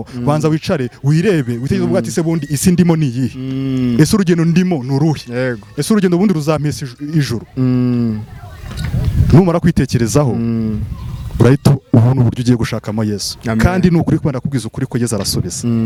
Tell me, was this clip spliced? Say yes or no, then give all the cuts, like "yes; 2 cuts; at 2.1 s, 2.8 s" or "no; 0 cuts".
no; 0 cuts